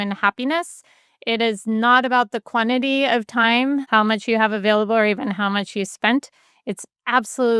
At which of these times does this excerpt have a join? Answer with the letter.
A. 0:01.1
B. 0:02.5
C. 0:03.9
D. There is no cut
C